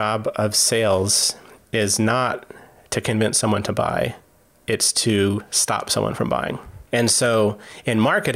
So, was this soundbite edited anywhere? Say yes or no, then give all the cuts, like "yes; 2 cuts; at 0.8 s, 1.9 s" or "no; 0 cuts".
no; 0 cuts